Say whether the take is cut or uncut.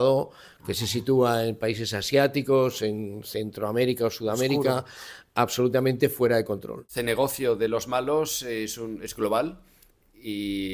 cut